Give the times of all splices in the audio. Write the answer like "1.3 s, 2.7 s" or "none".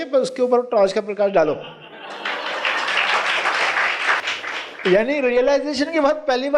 4.3 s